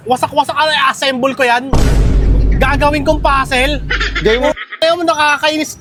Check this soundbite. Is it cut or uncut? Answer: uncut